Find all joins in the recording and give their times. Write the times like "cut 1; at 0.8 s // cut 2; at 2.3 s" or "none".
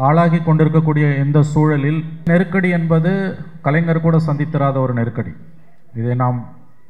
cut 1; at 2.3 s